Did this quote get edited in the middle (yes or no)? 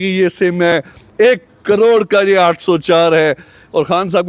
no